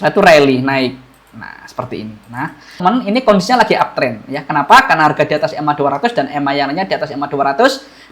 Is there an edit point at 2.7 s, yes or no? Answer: yes